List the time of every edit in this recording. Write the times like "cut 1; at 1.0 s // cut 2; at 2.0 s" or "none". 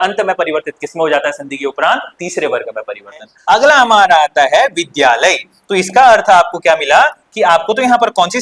cut 1; at 3.3 s